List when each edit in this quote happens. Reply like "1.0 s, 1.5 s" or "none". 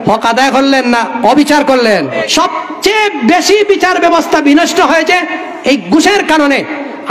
2.2 s